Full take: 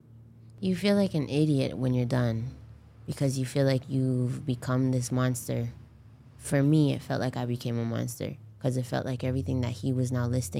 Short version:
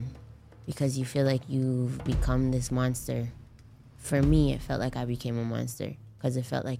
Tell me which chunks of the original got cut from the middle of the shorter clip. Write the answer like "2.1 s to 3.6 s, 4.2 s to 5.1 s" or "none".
none